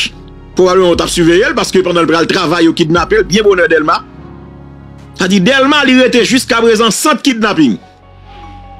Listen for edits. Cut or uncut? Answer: cut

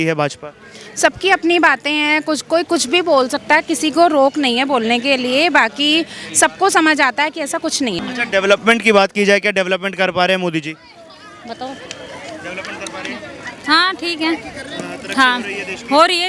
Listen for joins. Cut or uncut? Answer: cut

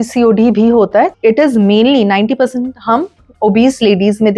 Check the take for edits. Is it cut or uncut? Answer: cut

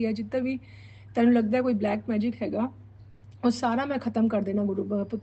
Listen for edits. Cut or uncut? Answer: uncut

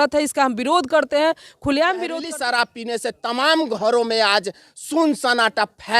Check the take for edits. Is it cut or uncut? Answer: cut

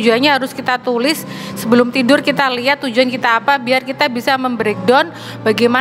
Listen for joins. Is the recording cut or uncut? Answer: uncut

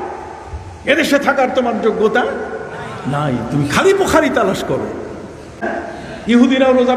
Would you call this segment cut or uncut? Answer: cut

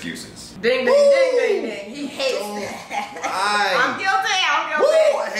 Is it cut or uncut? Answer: uncut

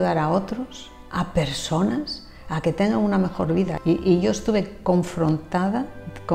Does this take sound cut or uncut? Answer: cut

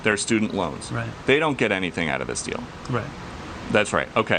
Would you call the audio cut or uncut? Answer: cut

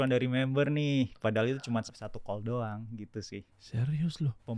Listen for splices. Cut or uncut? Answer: cut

